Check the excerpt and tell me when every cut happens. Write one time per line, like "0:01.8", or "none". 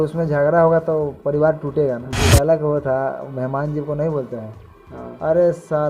0:02.3